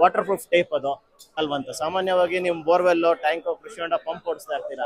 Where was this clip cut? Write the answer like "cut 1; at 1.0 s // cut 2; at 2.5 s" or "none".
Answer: cut 1; at 1.4 s